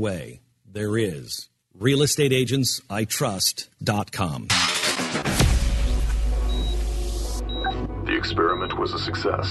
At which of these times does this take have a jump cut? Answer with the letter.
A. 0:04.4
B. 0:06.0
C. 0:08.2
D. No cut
A